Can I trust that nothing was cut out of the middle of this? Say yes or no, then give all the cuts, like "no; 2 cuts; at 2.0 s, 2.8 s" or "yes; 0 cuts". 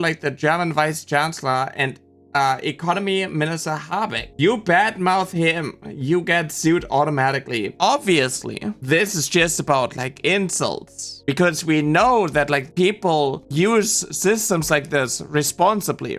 no; 2 cuts; at 7.7 s, 11.1 s